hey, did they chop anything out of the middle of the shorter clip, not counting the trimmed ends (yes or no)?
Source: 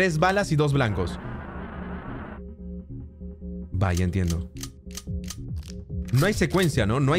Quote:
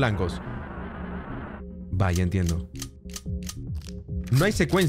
yes